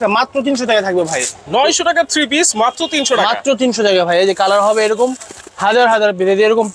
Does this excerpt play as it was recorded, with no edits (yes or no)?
yes